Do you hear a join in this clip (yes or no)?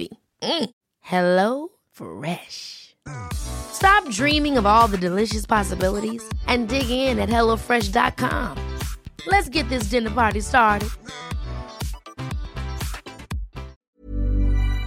yes